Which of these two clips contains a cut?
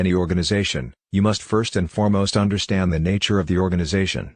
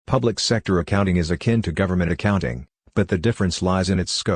second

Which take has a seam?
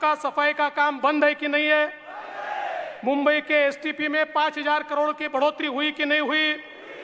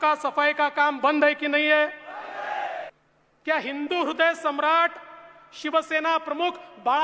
second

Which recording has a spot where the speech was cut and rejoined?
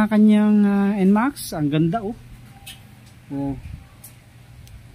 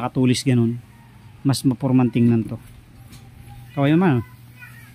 second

